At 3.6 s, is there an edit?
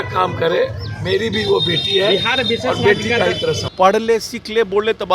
yes; 1 cut; at 3.6 s

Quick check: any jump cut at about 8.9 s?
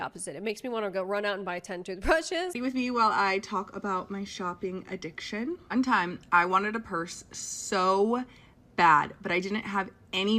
no; 1 cut; at 2.5 s

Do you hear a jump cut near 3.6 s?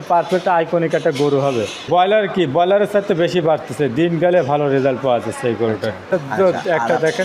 no; 2 cuts; at 1.8 s, 6.1 s

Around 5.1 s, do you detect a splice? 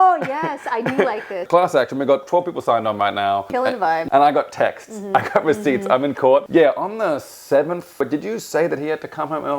no; 4 cuts; at 1.4 s, 3.9 s, 6.5 s, 8.0 s

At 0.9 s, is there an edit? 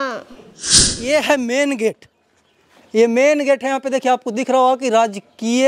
yes; 1 cut; at 0.9 s

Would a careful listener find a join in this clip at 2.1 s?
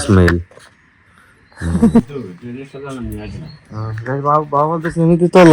yes; 1 cut; at 2.1 s

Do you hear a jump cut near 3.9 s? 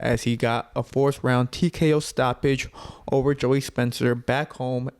no; 0 cuts

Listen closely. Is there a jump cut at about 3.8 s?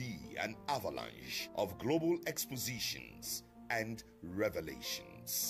no; 0 cuts

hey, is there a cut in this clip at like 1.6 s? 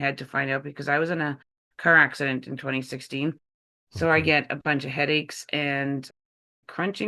no; 0 cuts

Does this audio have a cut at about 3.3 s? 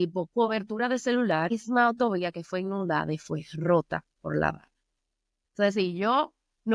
no; 1 cut; at 1.5 s

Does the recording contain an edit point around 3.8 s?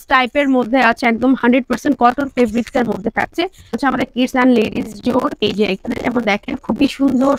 yes; 1 cut; at 3.8 s

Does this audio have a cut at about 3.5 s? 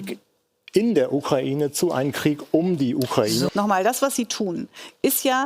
yes; 1 cut; at 3.5 s

